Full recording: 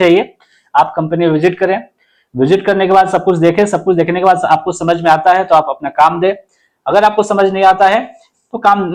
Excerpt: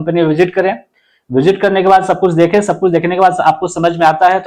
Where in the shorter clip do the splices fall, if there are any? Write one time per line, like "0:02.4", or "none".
none

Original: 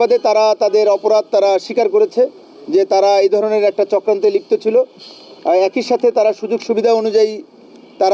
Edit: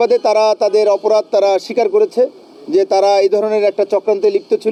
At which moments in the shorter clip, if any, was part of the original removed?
none

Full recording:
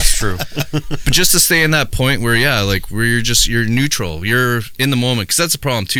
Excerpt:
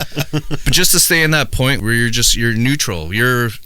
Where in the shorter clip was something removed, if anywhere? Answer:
0:01.8

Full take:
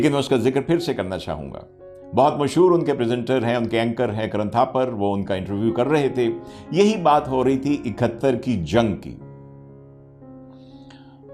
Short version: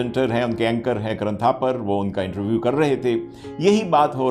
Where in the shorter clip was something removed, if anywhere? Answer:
none

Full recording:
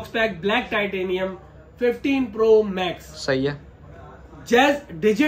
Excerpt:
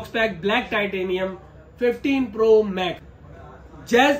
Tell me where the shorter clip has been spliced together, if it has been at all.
0:03.1

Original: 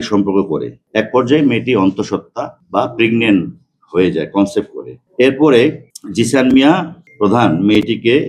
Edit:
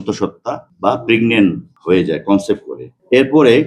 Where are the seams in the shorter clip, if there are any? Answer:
0:01.7

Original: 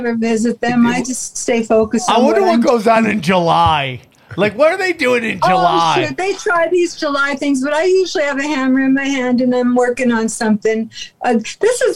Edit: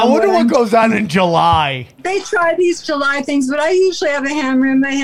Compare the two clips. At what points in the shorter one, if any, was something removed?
0:02.0

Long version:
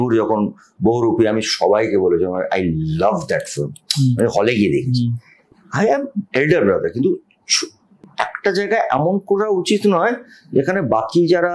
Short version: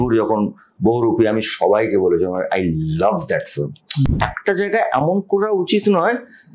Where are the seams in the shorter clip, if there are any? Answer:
0:04.1

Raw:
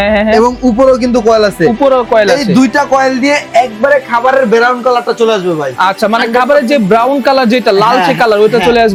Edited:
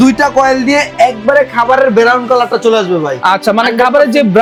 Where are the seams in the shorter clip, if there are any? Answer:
none

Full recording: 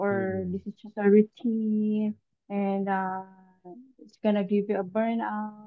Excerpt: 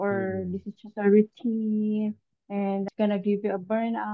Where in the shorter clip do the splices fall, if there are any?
0:02.9

